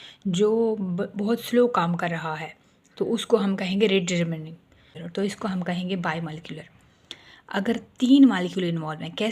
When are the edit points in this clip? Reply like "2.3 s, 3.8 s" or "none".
5.0 s